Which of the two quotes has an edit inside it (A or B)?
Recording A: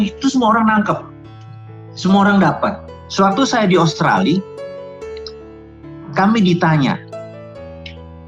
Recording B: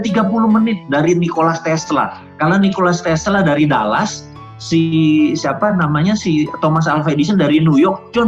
A